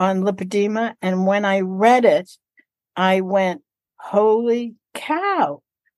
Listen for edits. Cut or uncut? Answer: uncut